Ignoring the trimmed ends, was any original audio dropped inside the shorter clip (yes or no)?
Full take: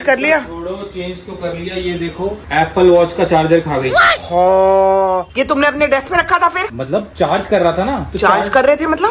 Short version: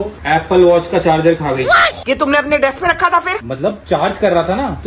yes